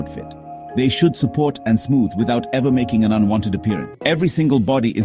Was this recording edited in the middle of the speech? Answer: yes; 1 cut; at 3.9 s

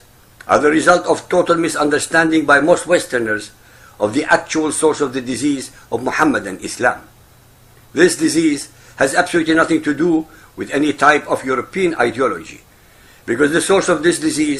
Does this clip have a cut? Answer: no; 0 cuts

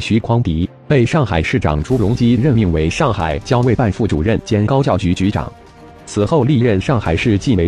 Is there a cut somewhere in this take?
no; 0 cuts

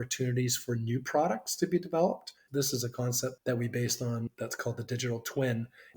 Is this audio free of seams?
no; 2 cuts; at 2.5 s, 3.4 s

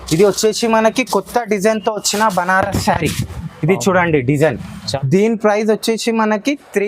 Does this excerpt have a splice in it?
yes; 1 cut; at 4.9 s

